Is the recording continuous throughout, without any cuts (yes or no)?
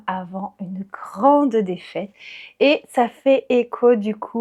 yes